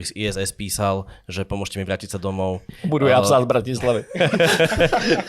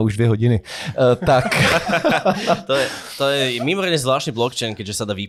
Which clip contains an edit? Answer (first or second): first